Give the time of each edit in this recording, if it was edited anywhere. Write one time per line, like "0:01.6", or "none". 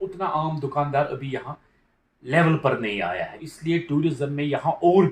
0:03.5